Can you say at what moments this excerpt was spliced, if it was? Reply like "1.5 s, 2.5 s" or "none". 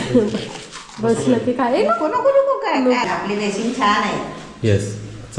3.0 s